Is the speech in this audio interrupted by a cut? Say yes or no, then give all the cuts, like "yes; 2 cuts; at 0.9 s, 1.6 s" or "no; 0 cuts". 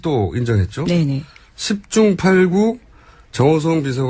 no; 0 cuts